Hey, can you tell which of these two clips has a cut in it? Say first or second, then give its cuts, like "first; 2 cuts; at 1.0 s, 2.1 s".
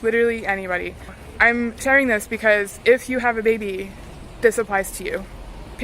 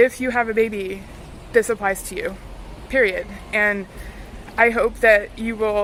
first; 1 cut; at 1.2 s